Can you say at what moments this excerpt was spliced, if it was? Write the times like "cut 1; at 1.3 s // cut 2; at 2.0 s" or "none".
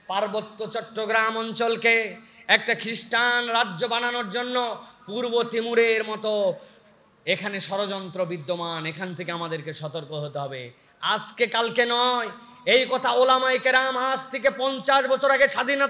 none